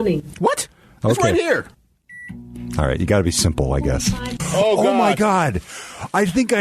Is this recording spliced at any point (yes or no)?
yes